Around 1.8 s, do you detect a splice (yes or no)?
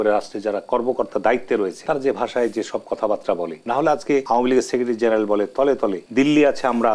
yes